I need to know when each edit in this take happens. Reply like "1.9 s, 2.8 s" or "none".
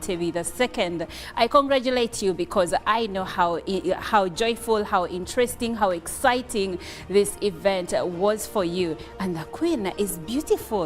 5.2 s, 9.8 s